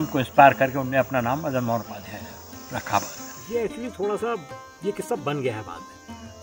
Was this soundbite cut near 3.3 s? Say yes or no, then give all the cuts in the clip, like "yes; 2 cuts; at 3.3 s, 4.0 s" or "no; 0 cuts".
yes; 1 cut; at 3.3 s